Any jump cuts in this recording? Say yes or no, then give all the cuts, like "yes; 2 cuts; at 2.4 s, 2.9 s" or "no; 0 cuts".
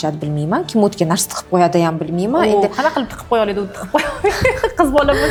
no; 0 cuts